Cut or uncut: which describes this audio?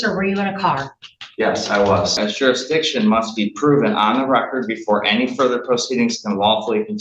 cut